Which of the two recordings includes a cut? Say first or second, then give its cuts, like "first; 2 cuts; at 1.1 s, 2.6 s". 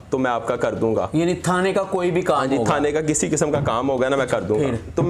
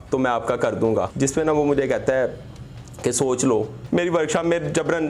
second; 2 cuts; at 1.1 s, 3.8 s